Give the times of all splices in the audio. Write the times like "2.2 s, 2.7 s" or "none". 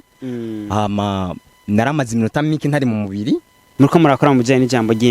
3.6 s

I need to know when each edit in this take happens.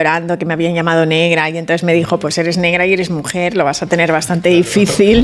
none

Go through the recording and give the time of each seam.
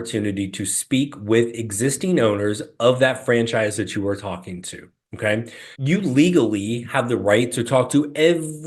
5.6 s

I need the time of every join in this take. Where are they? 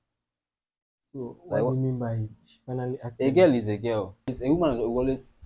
4.3 s

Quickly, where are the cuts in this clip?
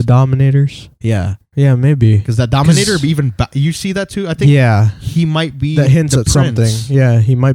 1.4 s

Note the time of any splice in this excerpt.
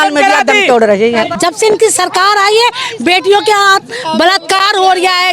1.3 s

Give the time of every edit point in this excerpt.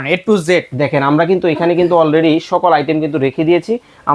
none

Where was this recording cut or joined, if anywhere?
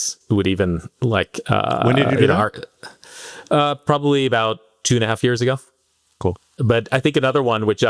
6.6 s

